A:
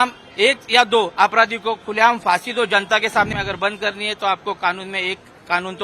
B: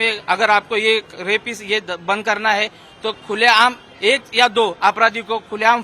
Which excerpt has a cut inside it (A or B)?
A